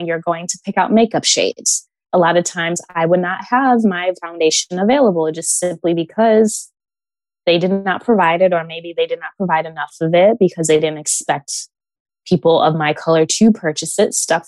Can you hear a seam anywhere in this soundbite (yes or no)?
no